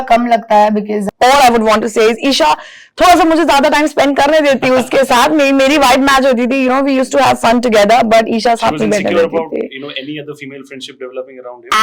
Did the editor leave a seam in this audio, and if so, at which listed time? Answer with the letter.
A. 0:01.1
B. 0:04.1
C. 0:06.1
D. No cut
A